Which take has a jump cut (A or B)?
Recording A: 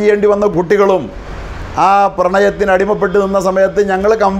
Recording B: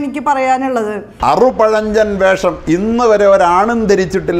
B